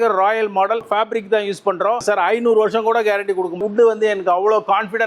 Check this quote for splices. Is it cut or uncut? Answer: cut